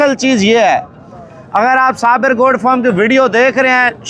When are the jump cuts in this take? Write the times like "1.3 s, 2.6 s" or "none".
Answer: none